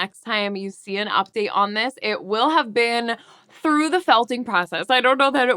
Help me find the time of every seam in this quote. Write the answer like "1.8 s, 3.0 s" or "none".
none